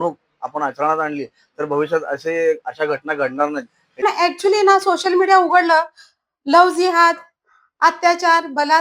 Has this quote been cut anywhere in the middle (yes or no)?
yes